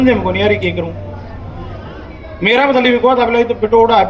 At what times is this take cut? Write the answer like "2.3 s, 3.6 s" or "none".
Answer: none